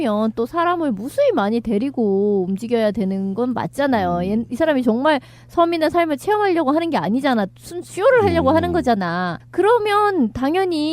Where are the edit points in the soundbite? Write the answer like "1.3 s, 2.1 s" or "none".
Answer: 4.4 s